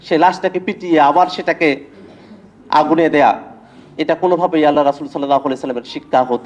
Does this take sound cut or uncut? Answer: uncut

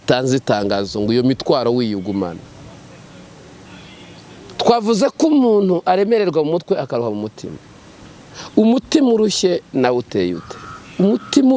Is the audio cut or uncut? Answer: uncut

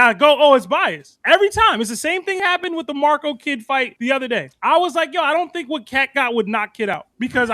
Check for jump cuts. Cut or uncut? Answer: uncut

